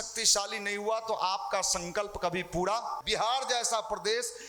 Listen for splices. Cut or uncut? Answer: cut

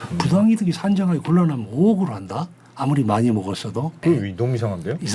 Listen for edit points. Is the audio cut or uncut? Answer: cut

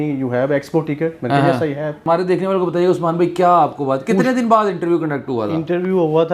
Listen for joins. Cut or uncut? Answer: cut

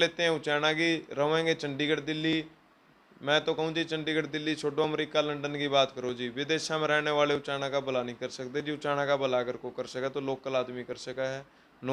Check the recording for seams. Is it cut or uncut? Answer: uncut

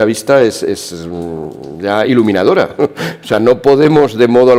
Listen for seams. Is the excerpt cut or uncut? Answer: uncut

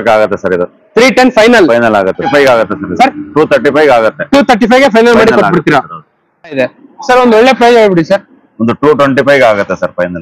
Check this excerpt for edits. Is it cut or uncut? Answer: cut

